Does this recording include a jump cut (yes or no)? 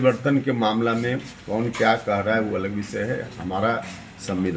no